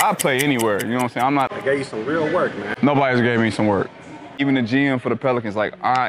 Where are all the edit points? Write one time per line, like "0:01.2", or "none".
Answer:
0:01.5
0:04.4